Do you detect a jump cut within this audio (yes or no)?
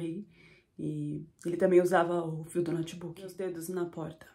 yes